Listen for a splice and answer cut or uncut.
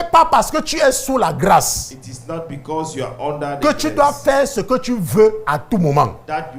uncut